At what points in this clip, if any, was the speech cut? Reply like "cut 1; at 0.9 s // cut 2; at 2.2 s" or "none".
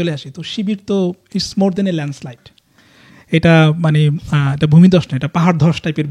none